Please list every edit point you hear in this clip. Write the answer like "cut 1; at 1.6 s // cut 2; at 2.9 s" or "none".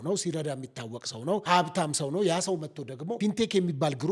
cut 1; at 1.4 s // cut 2; at 3.1 s